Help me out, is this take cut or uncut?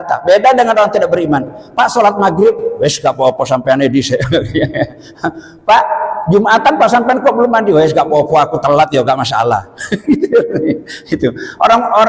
uncut